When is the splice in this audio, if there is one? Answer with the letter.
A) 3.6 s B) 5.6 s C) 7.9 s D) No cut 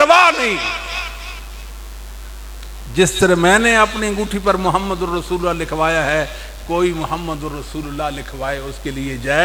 D